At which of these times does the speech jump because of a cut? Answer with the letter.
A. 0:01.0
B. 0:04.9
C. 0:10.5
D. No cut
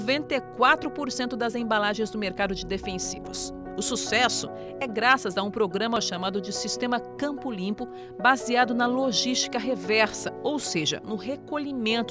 D